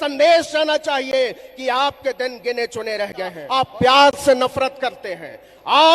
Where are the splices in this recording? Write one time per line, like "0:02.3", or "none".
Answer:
0:03.4